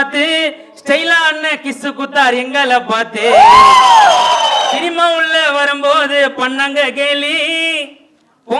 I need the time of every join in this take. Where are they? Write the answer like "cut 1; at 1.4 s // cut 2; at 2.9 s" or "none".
cut 1; at 4.8 s